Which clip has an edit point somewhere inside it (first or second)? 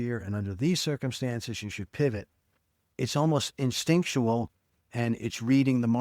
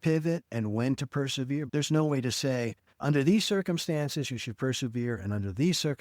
second